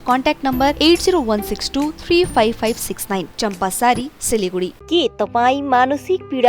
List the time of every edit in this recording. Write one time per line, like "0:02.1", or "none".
none